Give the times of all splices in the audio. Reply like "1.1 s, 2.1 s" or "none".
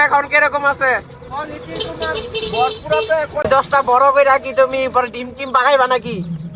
3.5 s